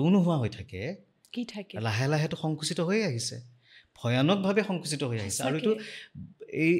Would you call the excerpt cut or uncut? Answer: uncut